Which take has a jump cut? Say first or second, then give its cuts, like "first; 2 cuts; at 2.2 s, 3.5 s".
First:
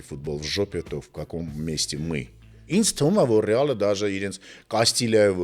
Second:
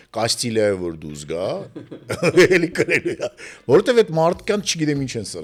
first; 1 cut; at 2.6 s